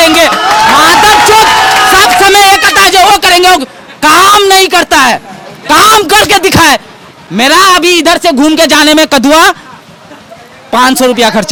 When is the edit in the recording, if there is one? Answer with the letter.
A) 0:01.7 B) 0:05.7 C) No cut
C